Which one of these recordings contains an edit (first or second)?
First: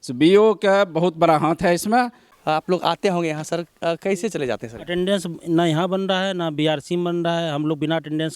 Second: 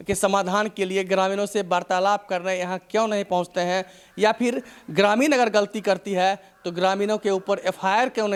first